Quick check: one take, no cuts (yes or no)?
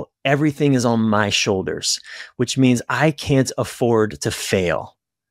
yes